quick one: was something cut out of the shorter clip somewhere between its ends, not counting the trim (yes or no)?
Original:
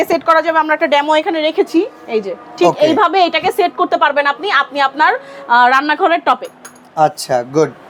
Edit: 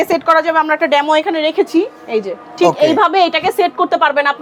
no